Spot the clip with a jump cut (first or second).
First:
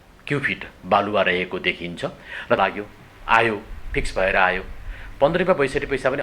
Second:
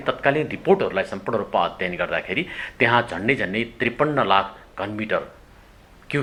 first